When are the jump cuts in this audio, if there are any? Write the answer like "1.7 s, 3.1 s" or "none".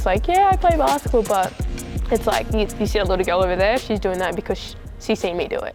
none